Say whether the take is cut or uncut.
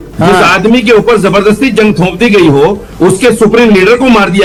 uncut